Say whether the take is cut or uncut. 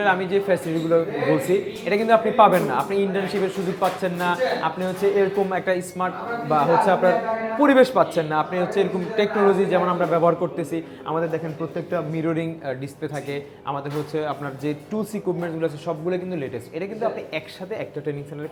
uncut